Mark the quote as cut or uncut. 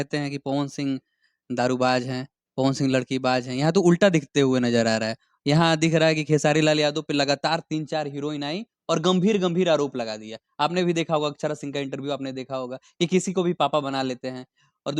uncut